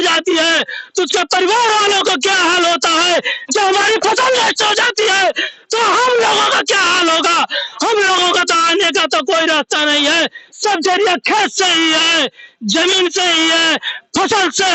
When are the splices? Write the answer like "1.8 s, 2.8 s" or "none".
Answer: none